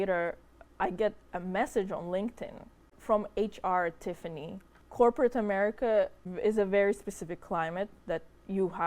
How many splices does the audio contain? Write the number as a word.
three